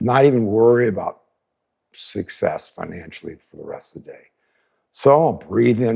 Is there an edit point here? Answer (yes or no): no